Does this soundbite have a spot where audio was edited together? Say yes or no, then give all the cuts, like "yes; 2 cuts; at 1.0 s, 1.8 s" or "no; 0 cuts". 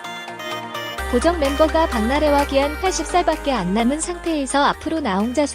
yes; 1 cut; at 1.1 s